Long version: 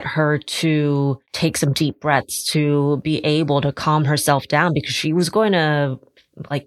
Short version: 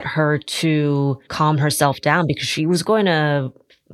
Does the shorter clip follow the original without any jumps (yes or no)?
no